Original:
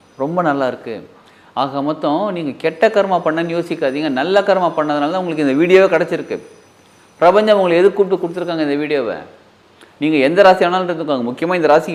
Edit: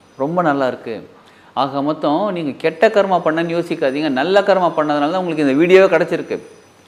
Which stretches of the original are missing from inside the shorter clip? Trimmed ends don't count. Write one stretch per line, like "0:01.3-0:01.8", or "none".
none